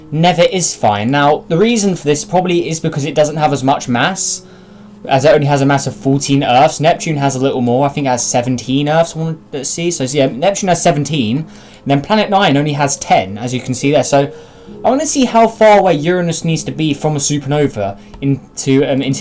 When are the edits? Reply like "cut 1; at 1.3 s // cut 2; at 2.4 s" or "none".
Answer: none